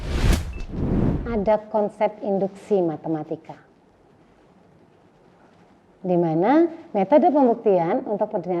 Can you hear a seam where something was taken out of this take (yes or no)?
yes